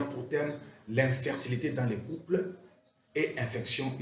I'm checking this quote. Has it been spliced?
no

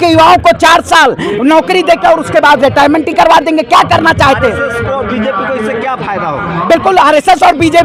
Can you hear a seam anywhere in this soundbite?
no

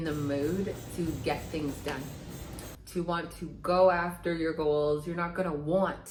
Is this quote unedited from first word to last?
yes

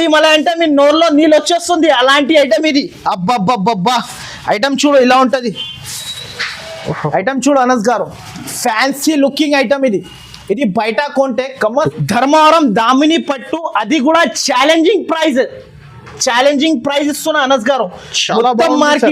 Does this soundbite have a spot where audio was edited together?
yes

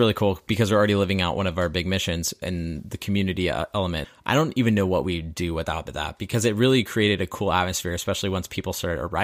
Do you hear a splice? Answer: yes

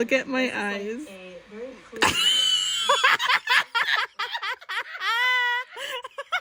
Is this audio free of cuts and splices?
yes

